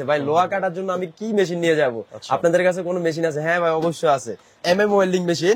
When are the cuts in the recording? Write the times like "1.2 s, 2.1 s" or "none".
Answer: 4.6 s

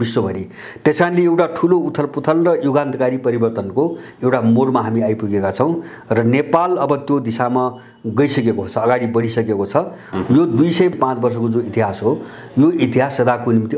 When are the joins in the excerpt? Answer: 10.0 s, 10.9 s

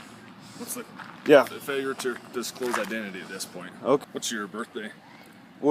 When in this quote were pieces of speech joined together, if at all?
4.0 s

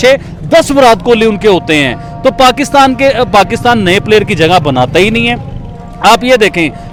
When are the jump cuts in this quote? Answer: none

